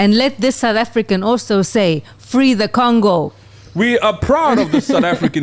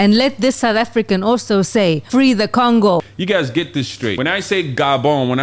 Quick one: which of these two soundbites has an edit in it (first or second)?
second